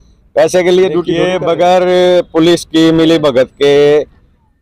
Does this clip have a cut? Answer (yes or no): yes